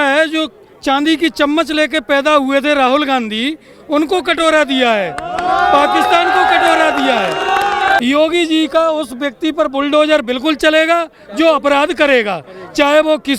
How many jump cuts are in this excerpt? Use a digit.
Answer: 1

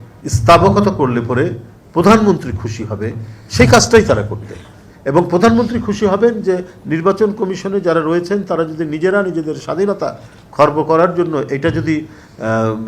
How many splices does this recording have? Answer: 0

